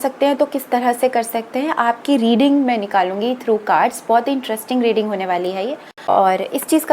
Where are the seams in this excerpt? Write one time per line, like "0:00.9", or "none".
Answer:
0:05.9